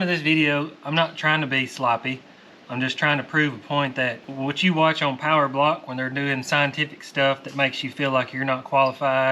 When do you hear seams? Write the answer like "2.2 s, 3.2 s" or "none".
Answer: 4.2 s